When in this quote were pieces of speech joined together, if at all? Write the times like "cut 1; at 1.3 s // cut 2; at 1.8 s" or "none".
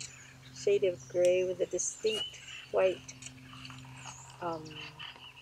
none